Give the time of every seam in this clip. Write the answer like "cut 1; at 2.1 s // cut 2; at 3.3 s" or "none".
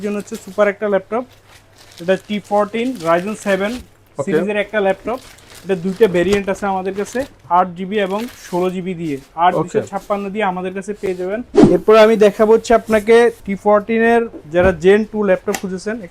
cut 1; at 11.5 s // cut 2; at 13.5 s